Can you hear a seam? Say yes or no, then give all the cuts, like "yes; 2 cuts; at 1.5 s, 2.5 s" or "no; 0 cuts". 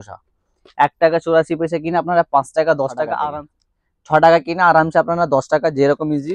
yes; 1 cut; at 3.3 s